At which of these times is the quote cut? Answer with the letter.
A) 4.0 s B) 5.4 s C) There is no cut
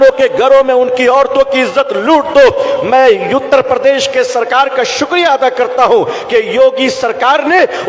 C